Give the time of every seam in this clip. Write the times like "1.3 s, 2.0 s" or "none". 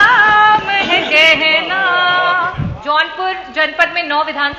2.7 s